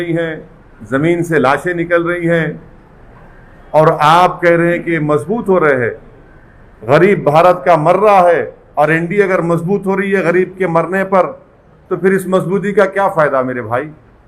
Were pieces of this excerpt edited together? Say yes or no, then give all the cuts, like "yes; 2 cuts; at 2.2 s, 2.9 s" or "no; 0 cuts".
no; 0 cuts